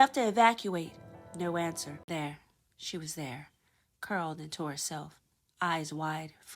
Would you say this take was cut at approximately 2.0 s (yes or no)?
yes